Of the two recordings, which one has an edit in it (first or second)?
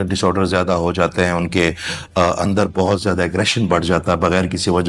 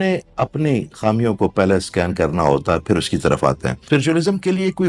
second